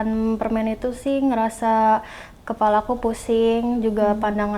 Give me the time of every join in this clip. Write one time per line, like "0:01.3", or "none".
none